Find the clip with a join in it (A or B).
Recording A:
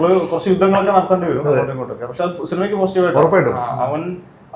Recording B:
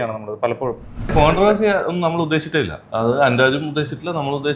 B